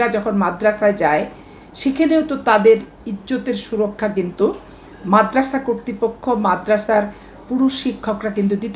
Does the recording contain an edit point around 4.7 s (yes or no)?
no